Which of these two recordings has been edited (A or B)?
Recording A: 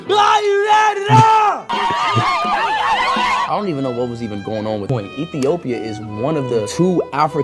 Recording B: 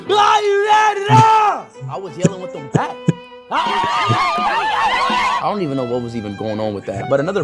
A